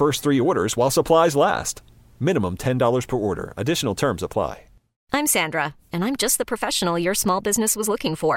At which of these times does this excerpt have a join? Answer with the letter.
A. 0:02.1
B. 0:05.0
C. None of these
B